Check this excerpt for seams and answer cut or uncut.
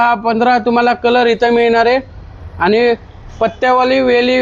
uncut